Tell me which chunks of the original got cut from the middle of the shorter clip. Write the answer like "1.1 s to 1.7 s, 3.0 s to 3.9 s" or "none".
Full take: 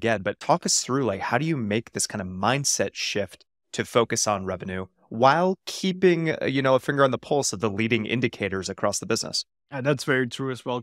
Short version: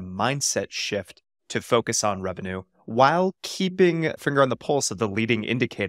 6.4 s to 6.8 s